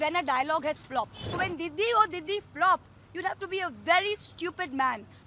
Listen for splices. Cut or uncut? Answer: cut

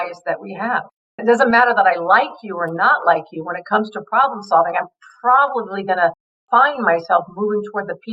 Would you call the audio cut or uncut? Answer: cut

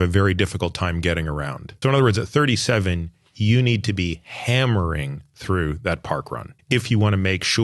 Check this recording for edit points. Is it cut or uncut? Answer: cut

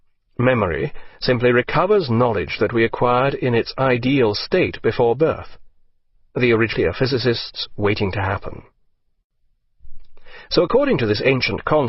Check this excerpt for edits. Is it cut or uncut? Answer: uncut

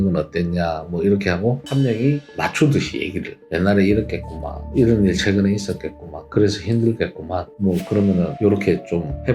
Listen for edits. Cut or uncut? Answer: uncut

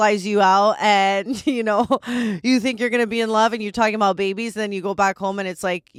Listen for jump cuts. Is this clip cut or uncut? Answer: uncut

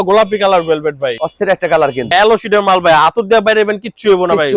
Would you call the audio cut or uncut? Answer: cut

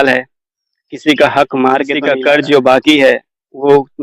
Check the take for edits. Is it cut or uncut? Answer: cut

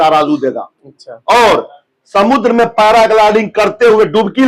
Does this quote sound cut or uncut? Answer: uncut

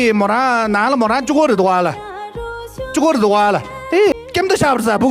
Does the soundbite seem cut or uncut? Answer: cut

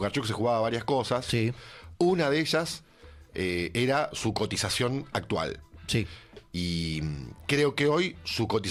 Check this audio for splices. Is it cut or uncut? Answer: uncut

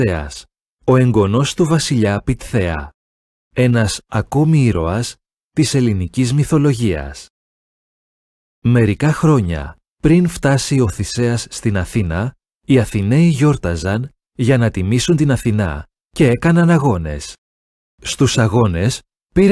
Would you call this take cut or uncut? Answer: uncut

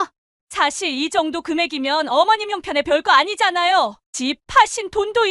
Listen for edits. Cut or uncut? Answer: uncut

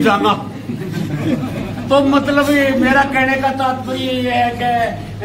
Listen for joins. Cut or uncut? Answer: uncut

